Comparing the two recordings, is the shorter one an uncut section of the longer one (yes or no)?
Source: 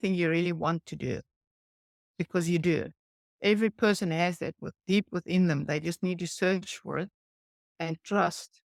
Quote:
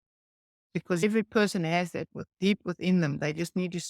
no